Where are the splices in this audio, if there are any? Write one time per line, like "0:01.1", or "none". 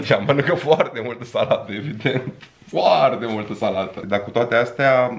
0:04.0